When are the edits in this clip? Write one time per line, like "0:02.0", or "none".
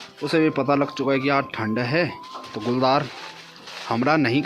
0:02.5